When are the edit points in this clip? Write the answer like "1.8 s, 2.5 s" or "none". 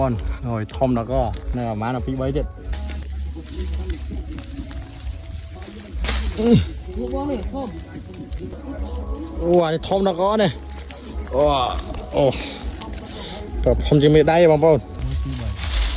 2.7 s, 8.6 s, 14.9 s